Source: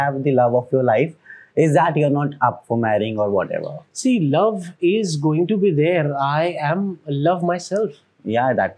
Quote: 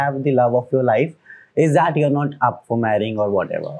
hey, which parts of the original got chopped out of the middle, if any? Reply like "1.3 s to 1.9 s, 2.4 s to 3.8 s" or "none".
none